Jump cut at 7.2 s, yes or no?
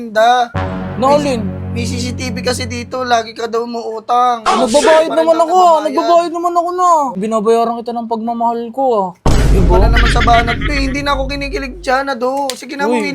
yes